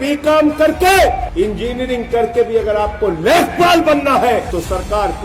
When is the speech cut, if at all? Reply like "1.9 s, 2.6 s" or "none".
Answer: 1.3 s, 4.5 s